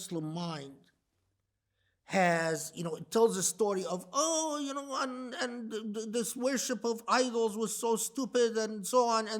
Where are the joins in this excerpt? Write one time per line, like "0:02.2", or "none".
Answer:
none